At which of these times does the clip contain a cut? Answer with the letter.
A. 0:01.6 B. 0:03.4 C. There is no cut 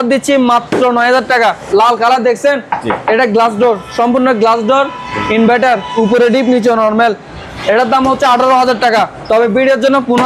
A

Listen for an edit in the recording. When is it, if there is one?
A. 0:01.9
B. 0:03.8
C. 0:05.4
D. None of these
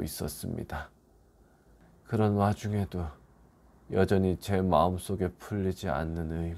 D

